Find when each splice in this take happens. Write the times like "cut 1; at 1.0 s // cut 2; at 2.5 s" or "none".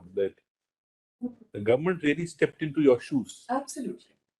none